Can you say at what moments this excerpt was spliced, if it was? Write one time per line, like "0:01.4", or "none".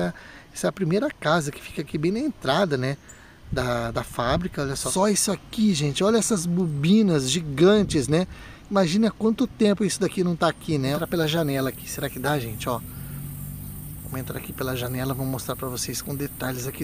0:04.8
0:10.9